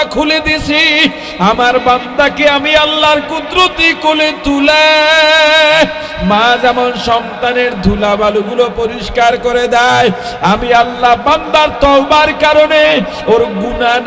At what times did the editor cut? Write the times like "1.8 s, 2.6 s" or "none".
none